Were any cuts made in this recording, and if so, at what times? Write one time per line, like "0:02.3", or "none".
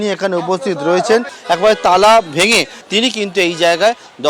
0:01.3
0:02.8